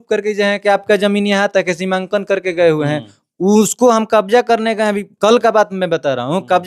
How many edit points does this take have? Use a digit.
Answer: 0